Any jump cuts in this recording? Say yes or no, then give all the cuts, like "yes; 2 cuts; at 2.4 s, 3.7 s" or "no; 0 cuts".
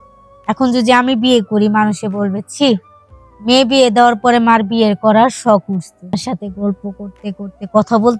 yes; 1 cut; at 6.1 s